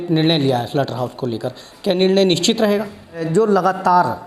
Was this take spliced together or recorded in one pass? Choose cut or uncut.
cut